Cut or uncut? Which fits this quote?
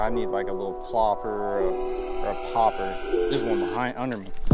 uncut